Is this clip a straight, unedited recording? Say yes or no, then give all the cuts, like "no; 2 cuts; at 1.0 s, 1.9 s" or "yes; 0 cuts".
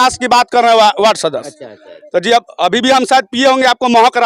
yes; 0 cuts